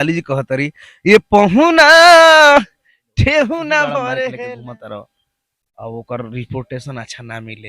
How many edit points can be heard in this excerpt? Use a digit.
1